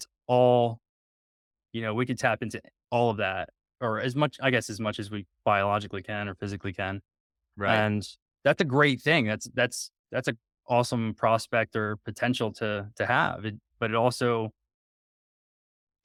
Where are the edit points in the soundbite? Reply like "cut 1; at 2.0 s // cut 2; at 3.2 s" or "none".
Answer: none